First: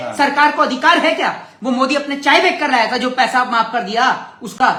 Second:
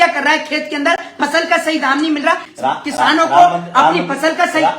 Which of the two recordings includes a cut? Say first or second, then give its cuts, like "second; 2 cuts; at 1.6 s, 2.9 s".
second; 1 cut; at 2.5 s